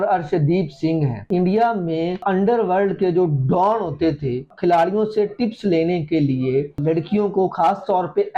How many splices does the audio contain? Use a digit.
4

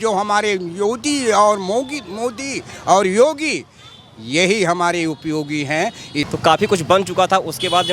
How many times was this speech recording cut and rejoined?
1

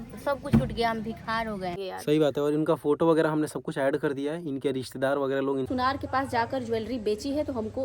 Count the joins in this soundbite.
2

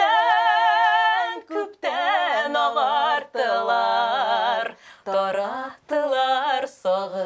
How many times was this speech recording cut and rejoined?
0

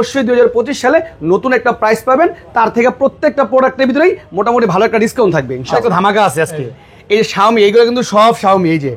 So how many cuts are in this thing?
1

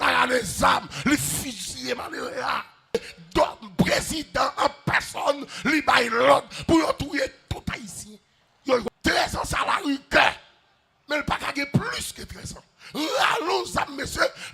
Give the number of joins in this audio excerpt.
2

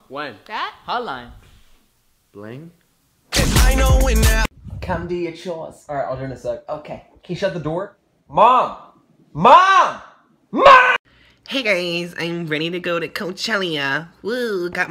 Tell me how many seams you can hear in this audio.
1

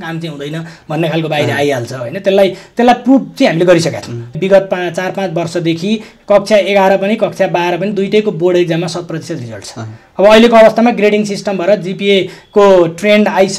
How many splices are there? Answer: 1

